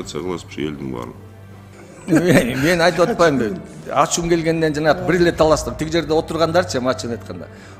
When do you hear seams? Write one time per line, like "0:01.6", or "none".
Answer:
0:01.3